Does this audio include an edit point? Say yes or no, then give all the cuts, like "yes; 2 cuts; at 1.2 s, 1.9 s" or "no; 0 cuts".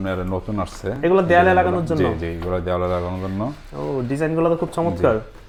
no; 0 cuts